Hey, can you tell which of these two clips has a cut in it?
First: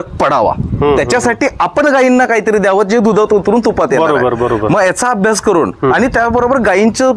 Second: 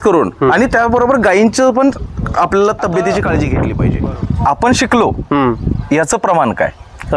second; 1 cut; at 3.5 s

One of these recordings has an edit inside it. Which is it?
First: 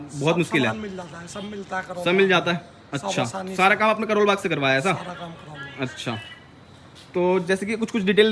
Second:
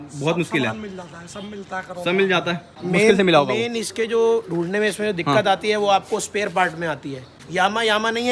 second; 2 cuts; at 2.8 s, 7.4 s

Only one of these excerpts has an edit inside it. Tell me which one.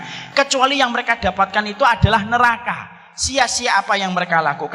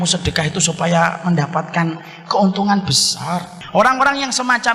second; 1 cut; at 3.5 s

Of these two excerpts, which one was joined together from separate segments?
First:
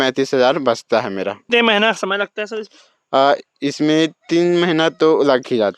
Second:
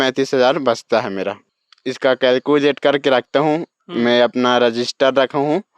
second; 1 cut; at 1.4 s

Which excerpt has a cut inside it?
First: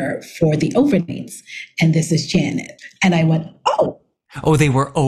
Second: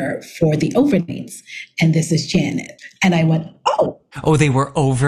second; 1 cut; at 4.0 s

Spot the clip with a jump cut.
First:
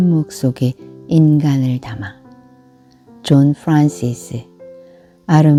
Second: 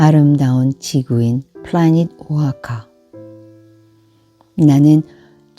second; 2 cuts; at 2.9 s, 4.5 s

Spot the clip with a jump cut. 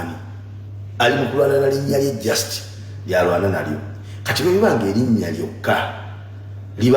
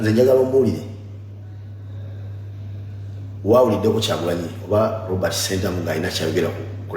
first; 1 cut; at 5.2 s

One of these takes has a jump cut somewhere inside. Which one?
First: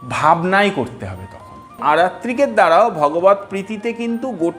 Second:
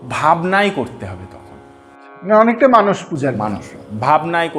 first; 1 cut; at 1.8 s

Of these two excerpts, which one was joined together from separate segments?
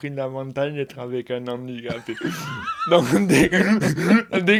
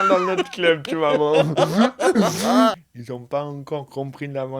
second; 1 cut; at 2.8 s

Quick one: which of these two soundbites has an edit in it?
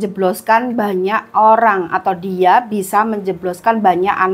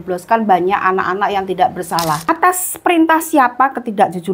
second; 1 cut; at 2.2 s

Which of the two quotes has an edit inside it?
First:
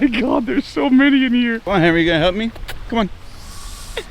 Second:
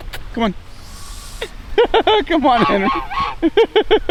first; 1 cut; at 1.6 s

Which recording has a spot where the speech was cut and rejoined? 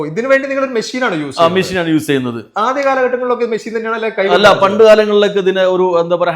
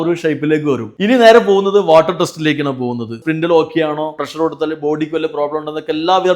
second; 3 cuts; at 0.9 s, 3.2 s, 4.1 s

